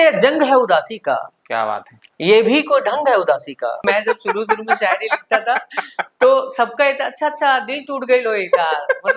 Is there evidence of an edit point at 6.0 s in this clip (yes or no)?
no